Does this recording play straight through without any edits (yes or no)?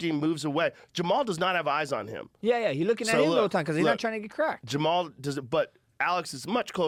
yes